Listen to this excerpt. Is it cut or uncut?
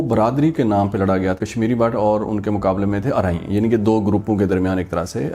cut